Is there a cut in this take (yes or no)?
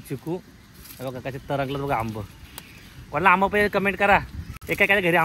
no